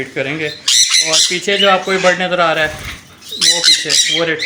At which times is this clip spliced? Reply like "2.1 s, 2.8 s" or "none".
none